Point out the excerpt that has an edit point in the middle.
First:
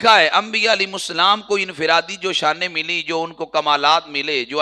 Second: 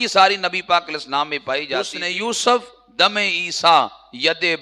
second; 1 cut; at 2.0 s

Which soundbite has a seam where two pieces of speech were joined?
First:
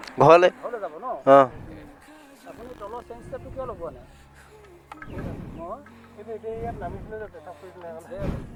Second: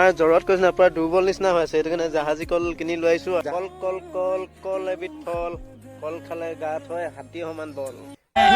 second; 1 cut; at 3.5 s

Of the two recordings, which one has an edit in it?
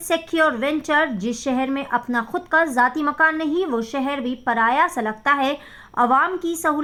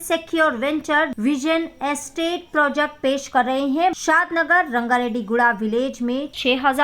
second; 2 cuts; at 1.1 s, 4.0 s

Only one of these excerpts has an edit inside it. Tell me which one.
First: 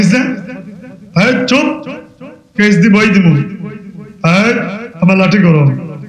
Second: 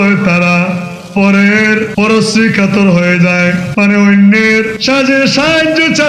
second; 3 cuts; at 1.9 s, 3.6 s, 4.8 s

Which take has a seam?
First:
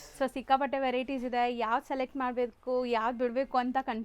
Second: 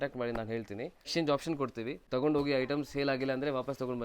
second; 2 cuts; at 1.0 s, 2.1 s

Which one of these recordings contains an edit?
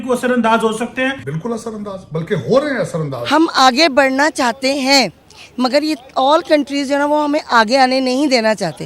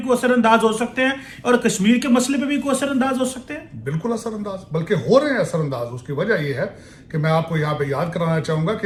first; 2 cuts; at 1.3 s, 3.2 s

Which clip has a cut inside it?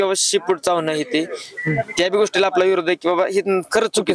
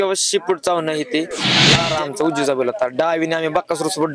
second; 1 cut; at 1.8 s

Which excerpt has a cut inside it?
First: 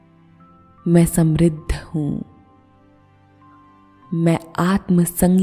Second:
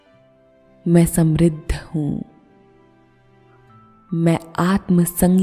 second; 2 cuts; at 2.6 s, 4.1 s

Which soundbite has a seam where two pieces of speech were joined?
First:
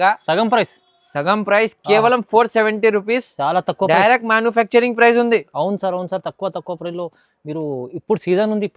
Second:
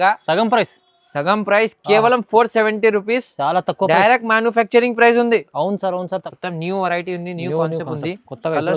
second; 1 cut; at 6.3 s

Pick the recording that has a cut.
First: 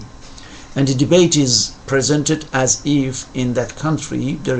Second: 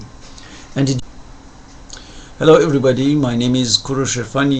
first; 1 cut; at 1.0 s

